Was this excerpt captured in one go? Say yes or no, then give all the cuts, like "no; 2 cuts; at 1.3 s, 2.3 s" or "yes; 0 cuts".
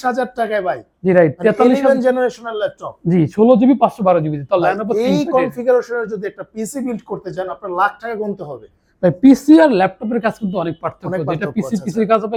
yes; 0 cuts